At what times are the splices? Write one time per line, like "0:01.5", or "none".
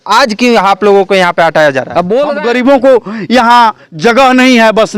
0:02.3